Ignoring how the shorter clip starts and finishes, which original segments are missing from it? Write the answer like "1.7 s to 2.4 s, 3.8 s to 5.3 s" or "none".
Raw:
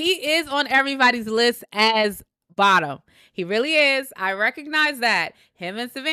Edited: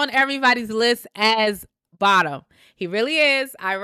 none